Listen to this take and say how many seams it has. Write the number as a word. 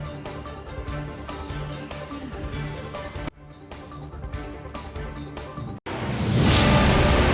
one